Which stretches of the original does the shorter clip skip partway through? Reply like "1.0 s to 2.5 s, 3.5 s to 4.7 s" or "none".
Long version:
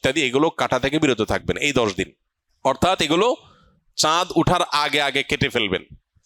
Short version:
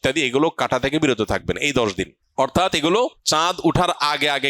2.2 s to 2.4 s, 3.5 s to 3.9 s